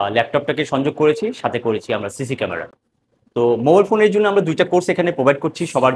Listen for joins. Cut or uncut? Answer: uncut